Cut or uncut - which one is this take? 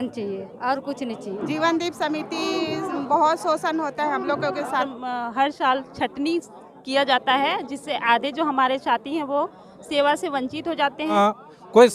cut